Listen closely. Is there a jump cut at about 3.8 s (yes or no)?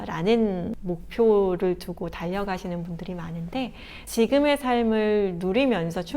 yes